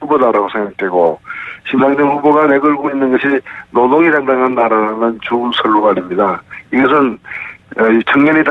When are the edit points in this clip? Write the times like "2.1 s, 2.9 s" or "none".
1.8 s